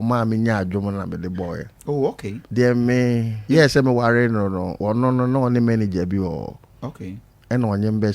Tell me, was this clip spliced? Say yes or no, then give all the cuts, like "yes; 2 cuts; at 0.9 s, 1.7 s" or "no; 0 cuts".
yes; 3 cuts; at 2.3 s, 3.3 s, 4.7 s